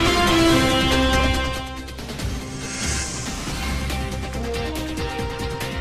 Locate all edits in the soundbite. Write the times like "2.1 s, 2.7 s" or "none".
none